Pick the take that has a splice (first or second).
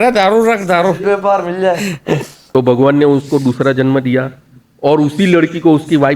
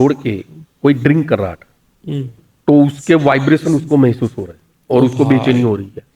first